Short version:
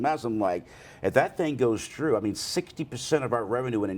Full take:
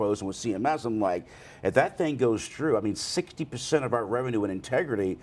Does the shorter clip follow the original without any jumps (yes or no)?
yes